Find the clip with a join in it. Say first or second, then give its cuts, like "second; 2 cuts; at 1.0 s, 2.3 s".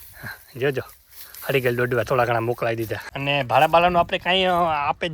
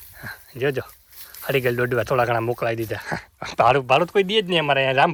first; 1 cut; at 3.0 s